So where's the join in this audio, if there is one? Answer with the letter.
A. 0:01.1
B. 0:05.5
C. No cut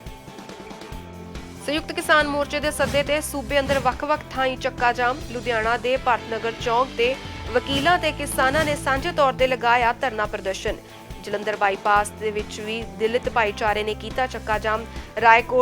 A